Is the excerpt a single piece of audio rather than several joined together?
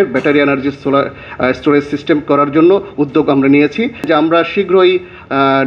no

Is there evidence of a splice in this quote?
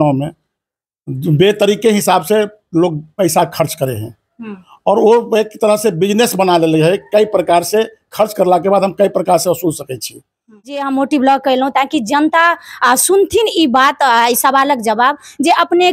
yes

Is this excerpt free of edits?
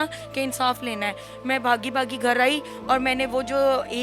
yes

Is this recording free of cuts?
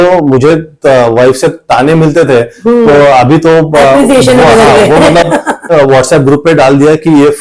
no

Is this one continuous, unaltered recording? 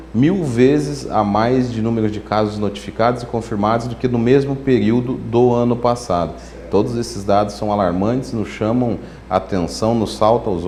yes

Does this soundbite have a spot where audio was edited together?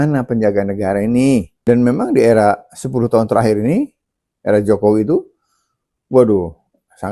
yes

